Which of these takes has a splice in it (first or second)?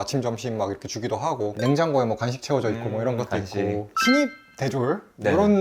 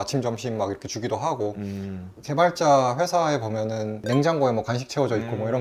first